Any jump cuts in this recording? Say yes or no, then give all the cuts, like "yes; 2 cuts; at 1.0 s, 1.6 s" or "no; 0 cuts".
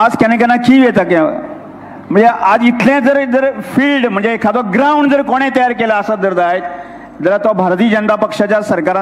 no; 0 cuts